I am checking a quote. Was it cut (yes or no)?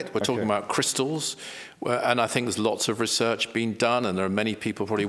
no